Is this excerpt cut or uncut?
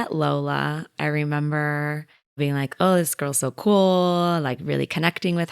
cut